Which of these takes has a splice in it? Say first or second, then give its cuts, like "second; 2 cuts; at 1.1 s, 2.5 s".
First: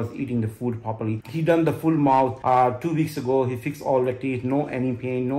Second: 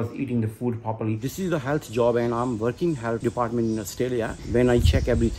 second; 2 cuts; at 1.3 s, 4.4 s